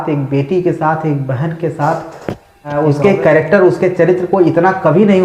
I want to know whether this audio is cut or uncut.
cut